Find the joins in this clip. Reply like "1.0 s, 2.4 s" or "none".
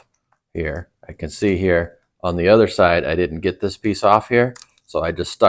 none